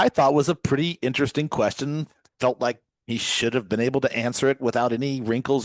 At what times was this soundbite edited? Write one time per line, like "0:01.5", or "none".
none